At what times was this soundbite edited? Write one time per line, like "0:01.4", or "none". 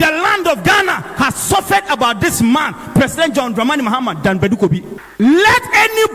none